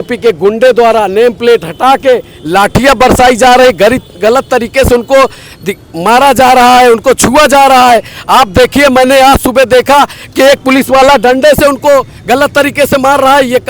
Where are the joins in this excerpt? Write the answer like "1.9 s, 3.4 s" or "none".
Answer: none